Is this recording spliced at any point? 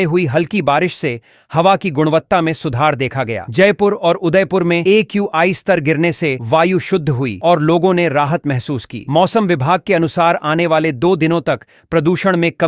no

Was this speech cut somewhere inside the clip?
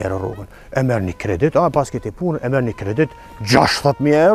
no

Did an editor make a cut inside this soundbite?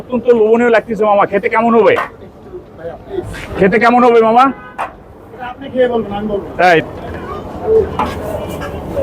yes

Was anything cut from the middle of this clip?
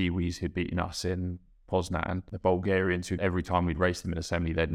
yes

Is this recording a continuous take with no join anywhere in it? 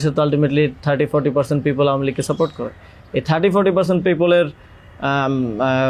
yes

